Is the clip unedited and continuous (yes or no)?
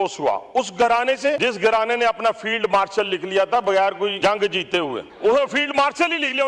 no